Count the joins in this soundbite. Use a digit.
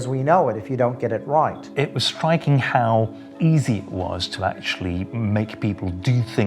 2